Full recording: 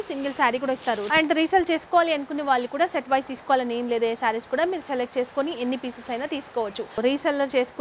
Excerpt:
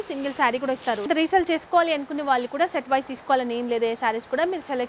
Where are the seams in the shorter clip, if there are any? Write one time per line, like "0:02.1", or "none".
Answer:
0:01.1